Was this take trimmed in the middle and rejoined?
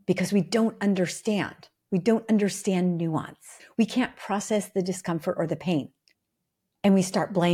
yes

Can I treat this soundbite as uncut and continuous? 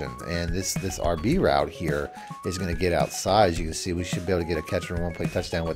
yes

